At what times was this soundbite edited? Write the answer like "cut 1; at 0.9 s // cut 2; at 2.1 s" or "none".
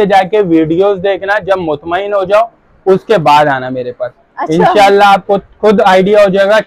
none